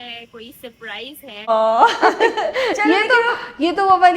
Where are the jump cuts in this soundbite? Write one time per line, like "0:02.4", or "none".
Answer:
0:01.5